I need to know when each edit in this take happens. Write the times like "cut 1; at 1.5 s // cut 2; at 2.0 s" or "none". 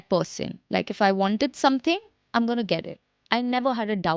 none